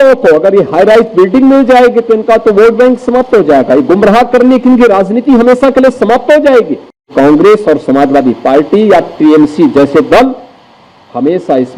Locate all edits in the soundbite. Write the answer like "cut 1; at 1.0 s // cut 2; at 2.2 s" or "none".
cut 1; at 7.1 s